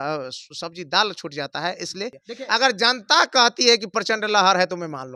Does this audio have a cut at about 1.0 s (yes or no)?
no